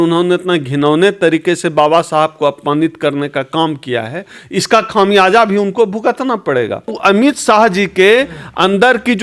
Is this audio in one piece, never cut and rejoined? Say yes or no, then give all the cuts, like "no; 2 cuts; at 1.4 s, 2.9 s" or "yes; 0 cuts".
no; 1 cut; at 6.9 s